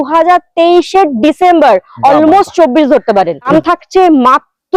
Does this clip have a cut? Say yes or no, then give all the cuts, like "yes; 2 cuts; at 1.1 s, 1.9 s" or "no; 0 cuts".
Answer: yes; 1 cut; at 3.5 s